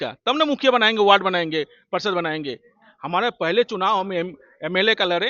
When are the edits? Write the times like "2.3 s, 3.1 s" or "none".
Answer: none